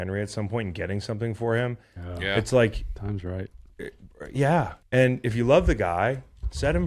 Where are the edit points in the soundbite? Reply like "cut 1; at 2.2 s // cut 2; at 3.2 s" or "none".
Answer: cut 1; at 4.8 s